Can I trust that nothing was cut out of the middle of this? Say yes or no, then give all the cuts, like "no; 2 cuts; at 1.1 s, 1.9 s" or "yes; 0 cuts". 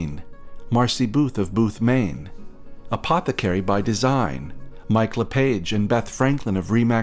yes; 0 cuts